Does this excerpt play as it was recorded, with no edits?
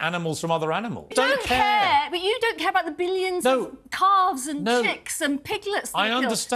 no; 1 cut; at 1.1 s

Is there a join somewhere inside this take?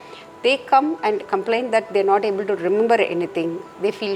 no; 0 cuts

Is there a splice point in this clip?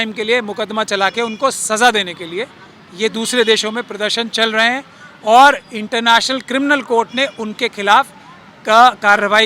no; 0 cuts

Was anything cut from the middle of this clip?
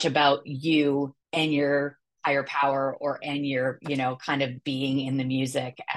yes; 1 cut; at 1.2 s

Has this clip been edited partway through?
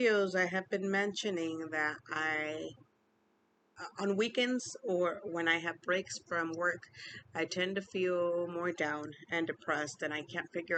no; 0 cuts

